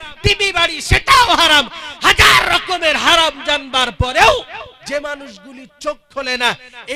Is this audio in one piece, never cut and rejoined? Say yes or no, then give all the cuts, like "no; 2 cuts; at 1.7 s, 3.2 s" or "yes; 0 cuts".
yes; 0 cuts